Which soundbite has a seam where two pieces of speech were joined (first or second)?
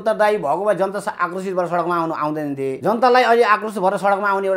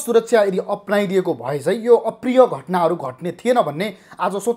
first